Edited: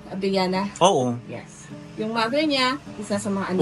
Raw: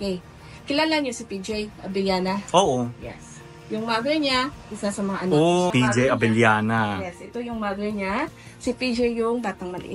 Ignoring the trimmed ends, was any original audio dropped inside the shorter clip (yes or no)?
no